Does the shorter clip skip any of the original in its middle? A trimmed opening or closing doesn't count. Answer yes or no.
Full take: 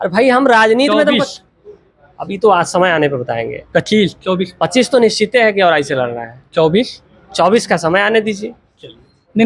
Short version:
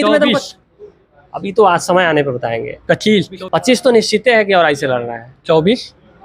yes